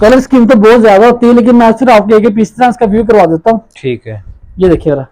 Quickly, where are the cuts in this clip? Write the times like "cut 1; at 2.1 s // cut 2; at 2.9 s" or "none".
none